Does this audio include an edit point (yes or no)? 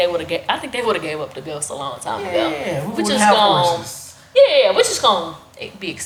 no